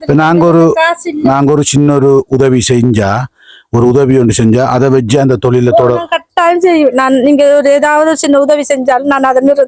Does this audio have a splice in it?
no; 0 cuts

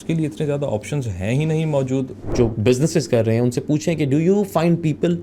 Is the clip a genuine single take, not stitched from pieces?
no; 1 cut; at 2.3 s

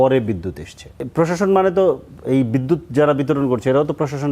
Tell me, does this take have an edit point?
yes; 1 cut; at 1.0 s

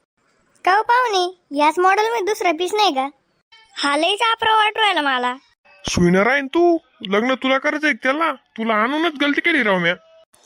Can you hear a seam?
no; 0 cuts

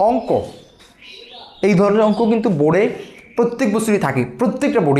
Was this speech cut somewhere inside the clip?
no; 0 cuts

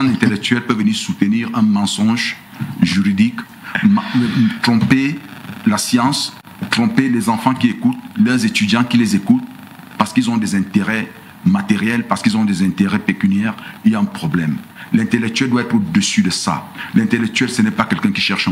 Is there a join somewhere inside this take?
no; 0 cuts

